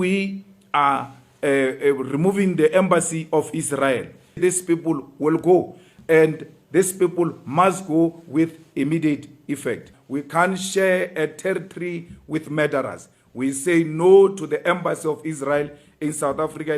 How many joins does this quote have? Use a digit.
2